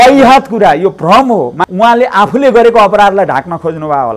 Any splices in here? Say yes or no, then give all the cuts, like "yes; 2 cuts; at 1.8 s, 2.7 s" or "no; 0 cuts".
yes; 1 cut; at 1.6 s